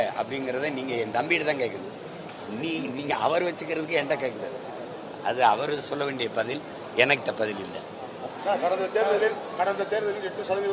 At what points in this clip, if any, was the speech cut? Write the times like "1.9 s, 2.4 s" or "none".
8.3 s